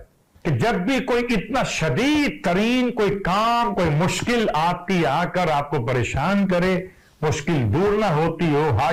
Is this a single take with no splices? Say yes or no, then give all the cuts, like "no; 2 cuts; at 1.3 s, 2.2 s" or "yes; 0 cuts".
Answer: yes; 0 cuts